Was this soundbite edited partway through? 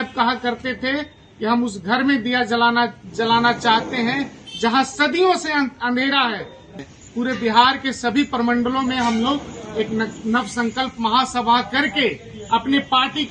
yes; 1 cut; at 6.7 s

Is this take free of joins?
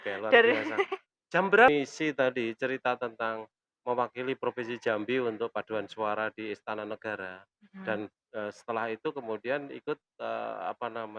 no; 1 cut; at 1.7 s

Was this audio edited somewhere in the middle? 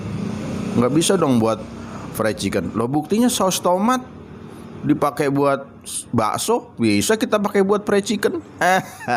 no; 0 cuts

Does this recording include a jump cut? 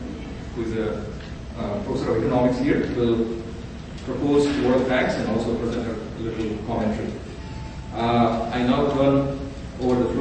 yes; 1 cut; at 7.0 s

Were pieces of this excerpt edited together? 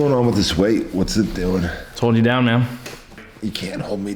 yes; 1 cut; at 3.3 s

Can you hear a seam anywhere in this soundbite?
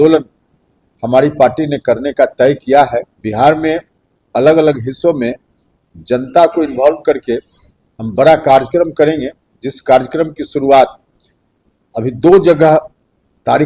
yes; 1 cut; at 3.2 s

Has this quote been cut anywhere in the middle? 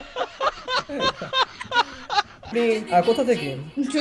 yes; 1 cut; at 2.5 s

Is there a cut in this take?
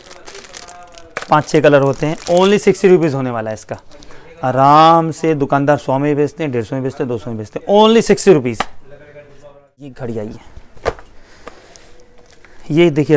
no; 0 cuts

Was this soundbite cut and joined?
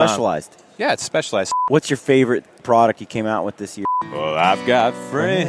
yes; 2 cuts; at 1.5 s, 3.8 s

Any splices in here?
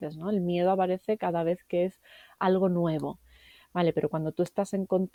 no; 0 cuts

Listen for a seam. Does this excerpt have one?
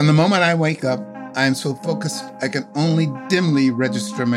yes; 1 cut; at 1.2 s

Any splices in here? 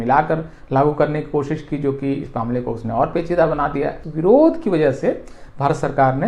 yes; 1 cut; at 4.0 s

